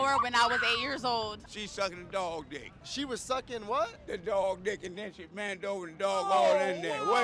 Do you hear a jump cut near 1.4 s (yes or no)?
yes